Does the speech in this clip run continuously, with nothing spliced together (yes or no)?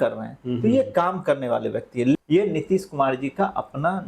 no